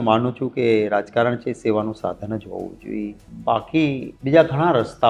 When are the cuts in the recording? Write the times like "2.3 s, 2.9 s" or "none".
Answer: 3.3 s, 4.1 s